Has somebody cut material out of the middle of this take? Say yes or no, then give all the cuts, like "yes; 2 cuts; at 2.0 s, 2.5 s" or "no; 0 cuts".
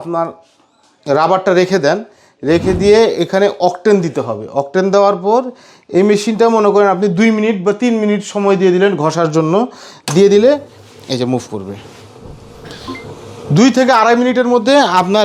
no; 0 cuts